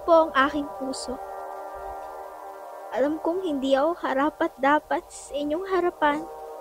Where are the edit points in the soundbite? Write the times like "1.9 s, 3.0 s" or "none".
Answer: 1.2 s, 2.7 s